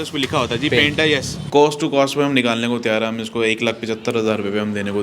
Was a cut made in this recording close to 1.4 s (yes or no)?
yes